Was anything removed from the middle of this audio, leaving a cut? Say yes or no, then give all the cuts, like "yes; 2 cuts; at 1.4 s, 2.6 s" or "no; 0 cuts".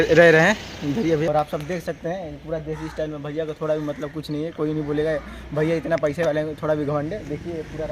yes; 1 cut; at 1.3 s